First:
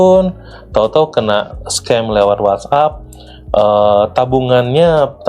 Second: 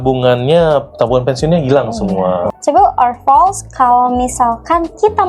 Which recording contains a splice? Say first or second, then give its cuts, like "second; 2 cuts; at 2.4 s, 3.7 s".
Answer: second; 1 cut; at 2.5 s